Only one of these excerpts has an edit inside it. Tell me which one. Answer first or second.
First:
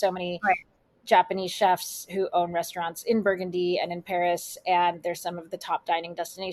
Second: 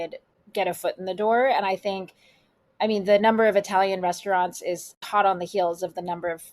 second